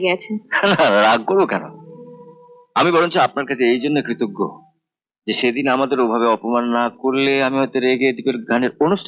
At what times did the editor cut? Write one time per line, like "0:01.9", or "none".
none